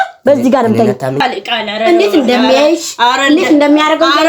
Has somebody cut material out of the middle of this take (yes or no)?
yes